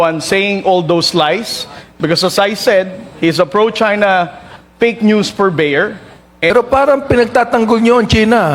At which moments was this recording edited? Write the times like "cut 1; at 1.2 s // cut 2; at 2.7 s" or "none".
cut 1; at 6.5 s